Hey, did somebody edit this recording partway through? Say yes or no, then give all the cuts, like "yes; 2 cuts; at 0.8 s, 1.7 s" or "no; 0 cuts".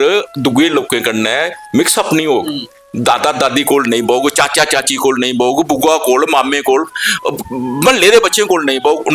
no; 0 cuts